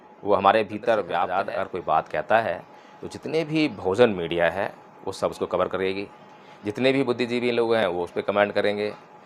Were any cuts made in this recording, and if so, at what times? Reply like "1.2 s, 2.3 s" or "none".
1.3 s